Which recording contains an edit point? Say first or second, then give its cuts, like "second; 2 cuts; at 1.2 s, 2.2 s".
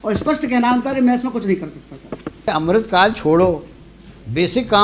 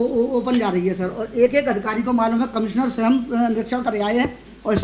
first; 1 cut; at 2.5 s